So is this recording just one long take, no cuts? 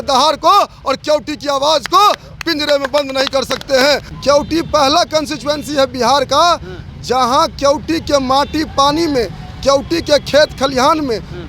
no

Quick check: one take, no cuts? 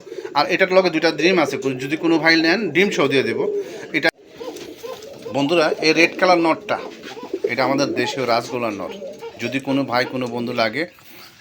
no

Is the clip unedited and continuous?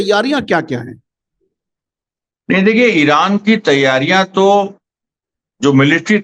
yes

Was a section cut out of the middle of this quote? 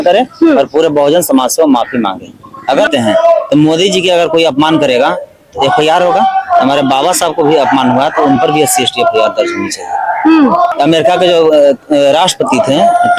yes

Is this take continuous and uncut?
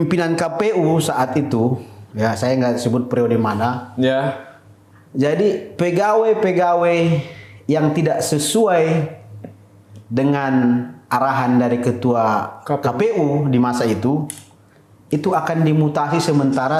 yes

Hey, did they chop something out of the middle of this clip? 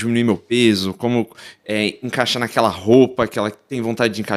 no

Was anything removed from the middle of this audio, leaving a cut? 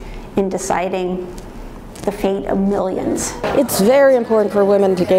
yes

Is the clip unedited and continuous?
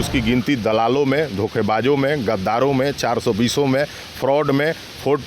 yes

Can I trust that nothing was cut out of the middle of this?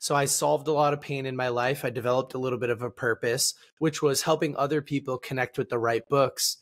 yes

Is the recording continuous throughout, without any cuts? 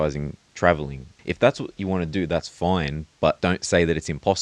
no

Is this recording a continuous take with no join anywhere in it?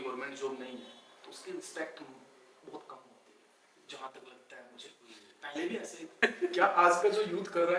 no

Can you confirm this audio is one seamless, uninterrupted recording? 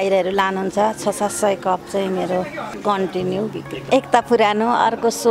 no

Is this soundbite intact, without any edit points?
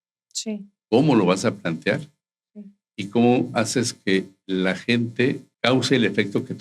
no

